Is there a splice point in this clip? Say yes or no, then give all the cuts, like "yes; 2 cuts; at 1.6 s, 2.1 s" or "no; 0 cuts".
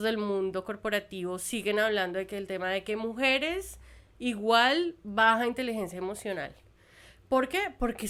no; 0 cuts